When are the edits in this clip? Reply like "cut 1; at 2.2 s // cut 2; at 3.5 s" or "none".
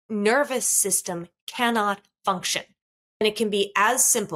cut 1; at 3.2 s